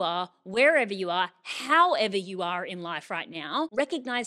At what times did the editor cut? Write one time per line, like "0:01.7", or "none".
none